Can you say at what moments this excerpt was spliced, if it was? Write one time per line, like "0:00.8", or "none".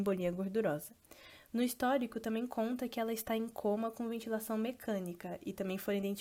none